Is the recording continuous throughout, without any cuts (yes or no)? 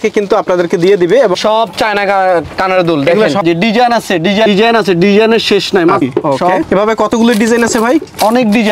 no